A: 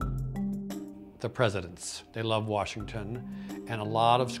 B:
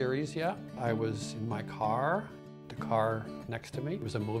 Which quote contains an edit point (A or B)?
B